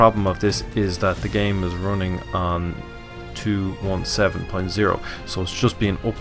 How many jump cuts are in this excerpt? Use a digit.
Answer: 0